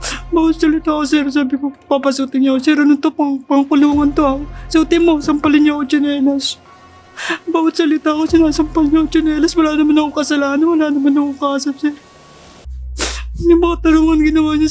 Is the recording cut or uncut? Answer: uncut